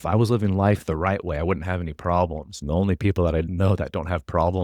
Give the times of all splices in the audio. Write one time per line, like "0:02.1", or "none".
0:02.5
0:03.5